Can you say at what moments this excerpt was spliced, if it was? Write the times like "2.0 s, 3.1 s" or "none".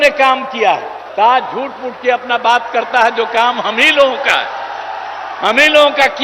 1.0 s